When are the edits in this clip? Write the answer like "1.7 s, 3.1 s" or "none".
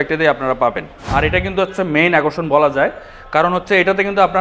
1.0 s